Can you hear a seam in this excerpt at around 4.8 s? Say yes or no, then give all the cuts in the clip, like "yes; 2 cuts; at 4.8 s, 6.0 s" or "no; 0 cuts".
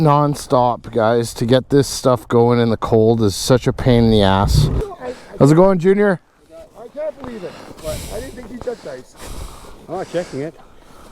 yes; 1 cut; at 4.8 s